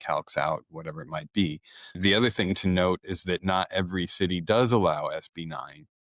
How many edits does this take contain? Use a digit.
1